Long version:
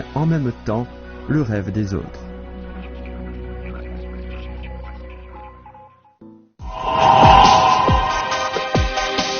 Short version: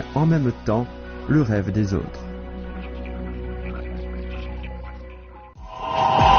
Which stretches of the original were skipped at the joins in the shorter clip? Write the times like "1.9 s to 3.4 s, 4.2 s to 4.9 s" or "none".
5.5 s to 6.5 s

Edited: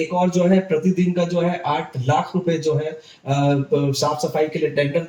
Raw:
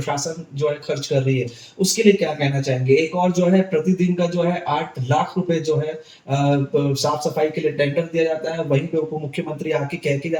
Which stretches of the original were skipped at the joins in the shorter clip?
none

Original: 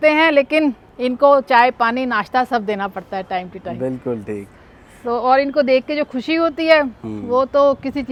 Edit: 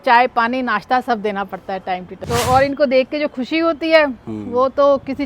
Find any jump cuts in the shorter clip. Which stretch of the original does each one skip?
3.6 s to 4.9 s

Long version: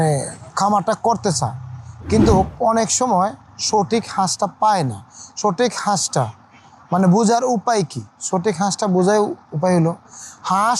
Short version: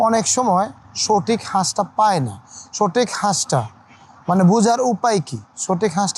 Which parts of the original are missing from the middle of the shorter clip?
none

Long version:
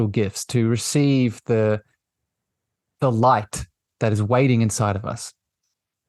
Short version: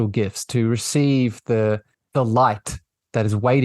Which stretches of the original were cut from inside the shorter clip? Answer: 1.9 s to 2.8 s

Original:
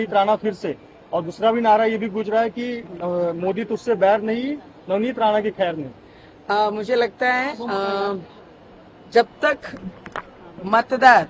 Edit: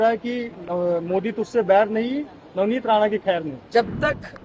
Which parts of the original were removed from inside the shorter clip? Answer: 5.9 s to 9.0 s

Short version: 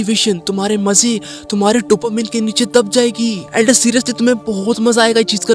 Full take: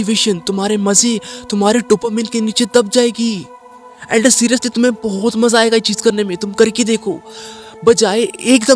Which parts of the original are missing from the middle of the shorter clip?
3.4 s to 4.0 s

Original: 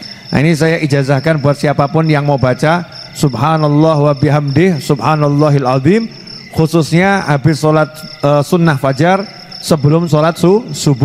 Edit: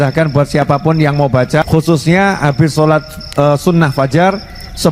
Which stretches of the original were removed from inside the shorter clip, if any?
2.7 s to 6.5 s

